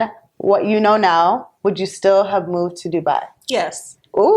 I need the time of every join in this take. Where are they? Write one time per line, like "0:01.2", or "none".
none